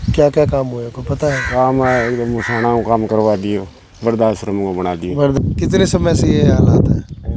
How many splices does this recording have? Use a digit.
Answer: 2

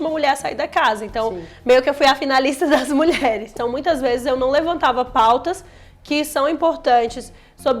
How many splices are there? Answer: 1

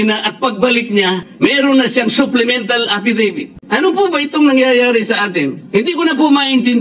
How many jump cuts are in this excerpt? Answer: 2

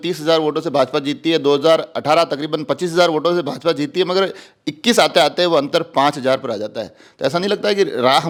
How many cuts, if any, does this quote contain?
0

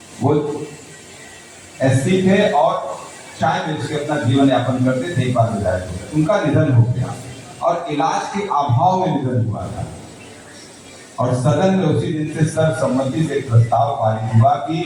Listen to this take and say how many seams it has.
0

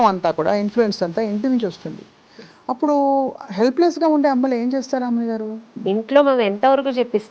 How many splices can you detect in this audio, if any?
1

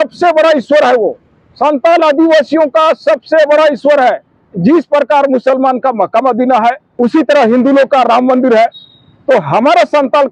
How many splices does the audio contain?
1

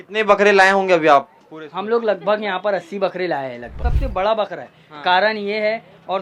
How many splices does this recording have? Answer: 1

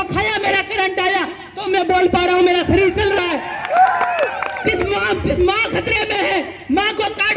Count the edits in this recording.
0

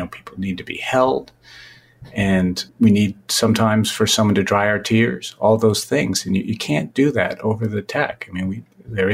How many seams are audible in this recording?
1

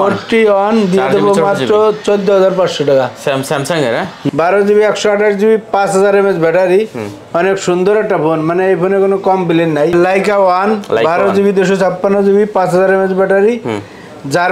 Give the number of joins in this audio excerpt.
2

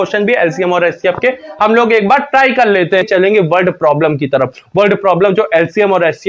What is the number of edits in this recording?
1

